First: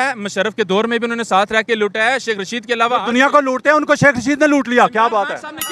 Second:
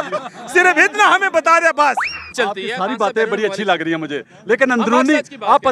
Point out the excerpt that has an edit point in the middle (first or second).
second